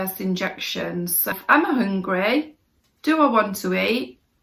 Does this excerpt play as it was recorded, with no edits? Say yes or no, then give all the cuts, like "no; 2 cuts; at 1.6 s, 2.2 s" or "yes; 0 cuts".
no; 1 cut; at 1.3 s